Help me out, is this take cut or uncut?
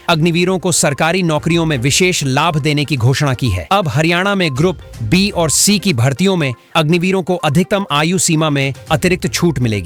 uncut